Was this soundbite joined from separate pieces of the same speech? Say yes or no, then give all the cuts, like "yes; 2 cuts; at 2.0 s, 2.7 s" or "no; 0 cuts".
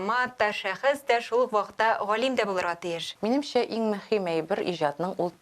yes; 1 cut; at 3.0 s